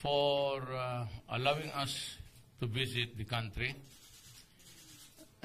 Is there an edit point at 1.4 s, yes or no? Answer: no